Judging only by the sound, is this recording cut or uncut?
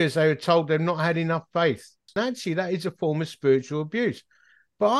cut